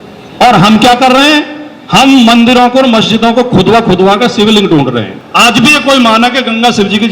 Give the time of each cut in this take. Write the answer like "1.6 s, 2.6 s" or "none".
5.2 s